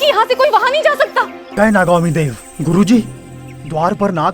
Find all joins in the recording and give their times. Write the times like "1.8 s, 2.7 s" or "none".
1.5 s